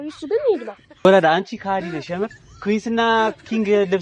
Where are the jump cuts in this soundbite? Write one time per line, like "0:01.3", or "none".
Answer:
0:01.0